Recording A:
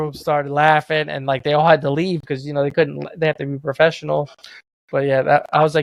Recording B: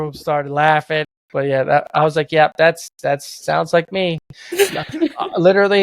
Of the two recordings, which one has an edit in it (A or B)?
B